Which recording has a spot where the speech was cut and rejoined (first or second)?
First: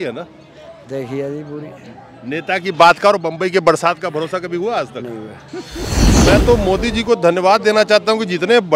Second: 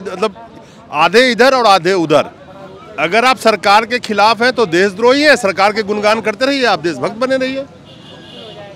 first